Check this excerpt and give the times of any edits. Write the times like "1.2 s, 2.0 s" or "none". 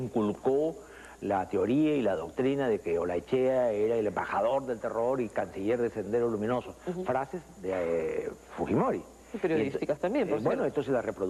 none